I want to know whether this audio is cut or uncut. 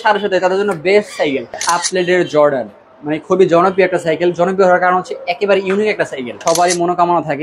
cut